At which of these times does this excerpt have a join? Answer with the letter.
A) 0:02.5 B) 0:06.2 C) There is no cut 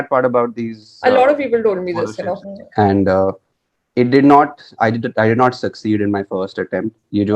A